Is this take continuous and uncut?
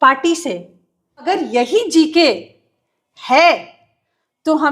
no; 1 cut; at 1.3 s

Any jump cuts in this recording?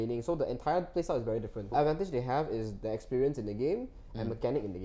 yes; 1 cut; at 1.7 s

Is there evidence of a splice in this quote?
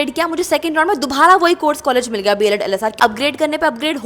yes; 1 cut; at 3.0 s

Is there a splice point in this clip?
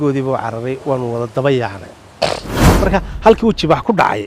yes; 1 cut; at 2.6 s

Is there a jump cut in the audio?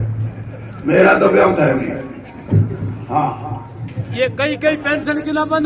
no; 0 cuts

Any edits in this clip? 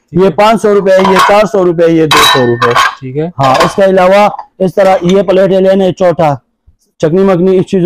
no; 0 cuts

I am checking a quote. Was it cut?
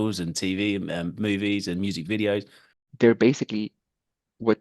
yes; 1 cut; at 2.8 s

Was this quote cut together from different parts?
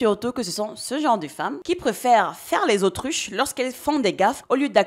no; 0 cuts

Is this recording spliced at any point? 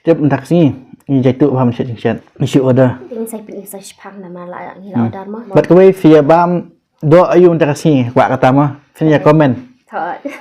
yes; 3 cuts; at 2.3 s, 3.0 s, 5.4 s

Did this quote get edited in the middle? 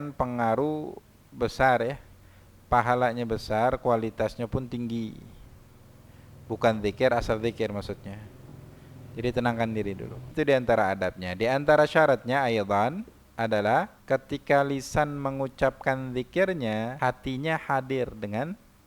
yes; 3 cuts; at 10.3 s, 14.0 s, 16.9 s

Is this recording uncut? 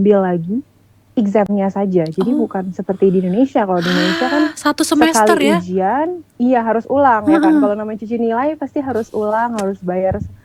yes; 0 cuts

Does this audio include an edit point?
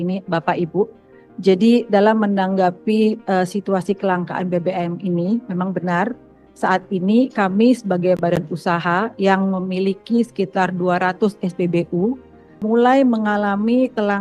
yes; 1 cut; at 12.6 s

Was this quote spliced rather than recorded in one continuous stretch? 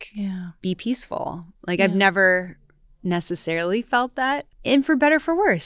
yes; 1 cut; at 4.5 s

